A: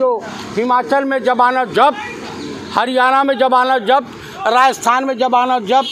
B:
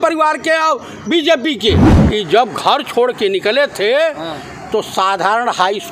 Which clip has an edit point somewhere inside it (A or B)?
B